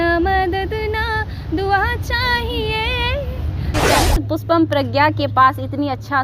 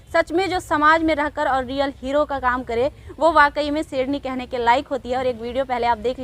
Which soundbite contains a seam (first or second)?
first